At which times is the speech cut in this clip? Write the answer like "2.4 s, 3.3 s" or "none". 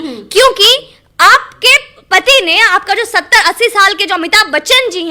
none